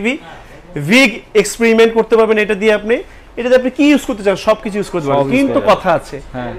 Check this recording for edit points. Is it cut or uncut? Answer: uncut